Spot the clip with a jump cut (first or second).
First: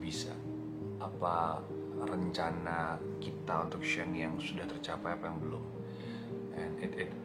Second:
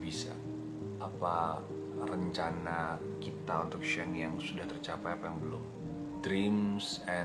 second